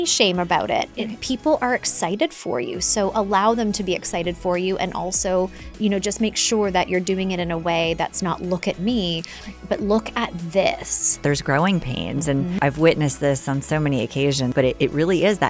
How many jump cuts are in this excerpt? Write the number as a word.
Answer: three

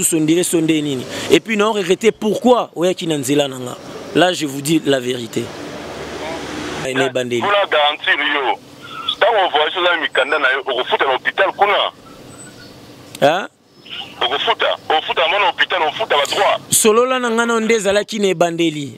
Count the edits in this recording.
one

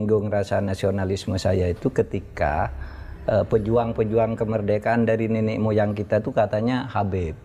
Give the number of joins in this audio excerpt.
zero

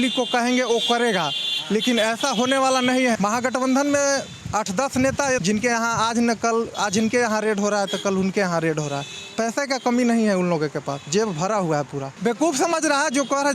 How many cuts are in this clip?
three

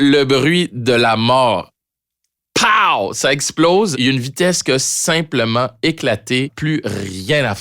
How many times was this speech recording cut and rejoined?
two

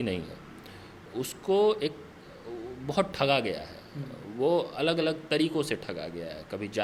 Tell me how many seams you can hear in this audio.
zero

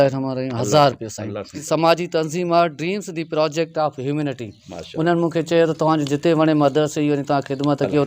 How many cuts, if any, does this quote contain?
one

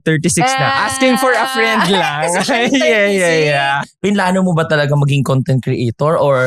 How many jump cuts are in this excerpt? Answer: one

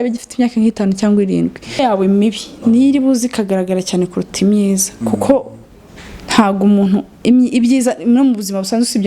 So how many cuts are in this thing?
one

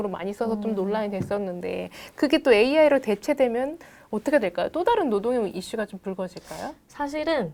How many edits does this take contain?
zero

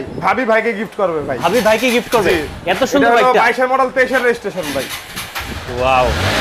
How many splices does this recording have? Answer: zero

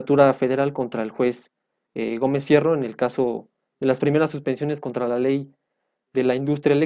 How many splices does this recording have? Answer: zero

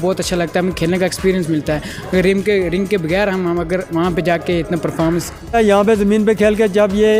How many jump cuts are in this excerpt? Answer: one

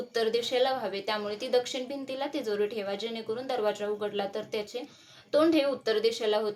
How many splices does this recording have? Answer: zero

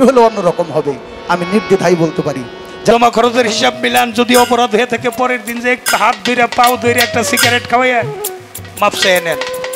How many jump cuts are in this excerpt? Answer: one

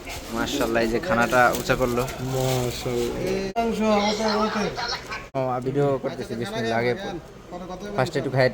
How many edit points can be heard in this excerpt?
two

